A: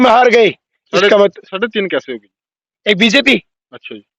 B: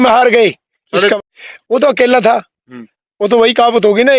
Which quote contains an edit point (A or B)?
B